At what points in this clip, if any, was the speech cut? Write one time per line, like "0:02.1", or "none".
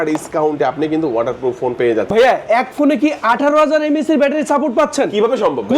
0:02.1